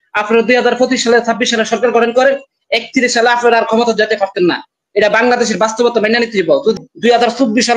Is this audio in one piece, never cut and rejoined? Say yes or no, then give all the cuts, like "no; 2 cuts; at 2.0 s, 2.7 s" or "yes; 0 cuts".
no; 1 cut; at 6.8 s